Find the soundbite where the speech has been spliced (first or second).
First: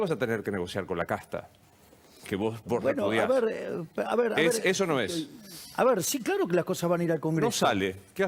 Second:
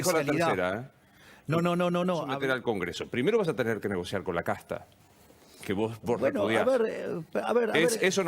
second